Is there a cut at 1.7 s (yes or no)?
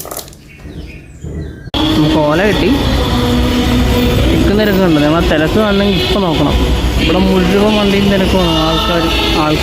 yes